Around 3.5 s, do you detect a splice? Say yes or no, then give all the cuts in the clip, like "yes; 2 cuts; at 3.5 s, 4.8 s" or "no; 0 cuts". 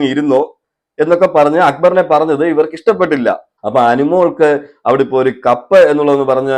yes; 1 cut; at 3.5 s